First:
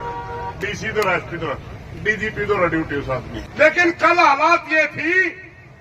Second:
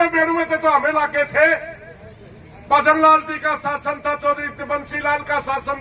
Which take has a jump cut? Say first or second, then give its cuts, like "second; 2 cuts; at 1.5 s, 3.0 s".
first; 1 cut; at 3.4 s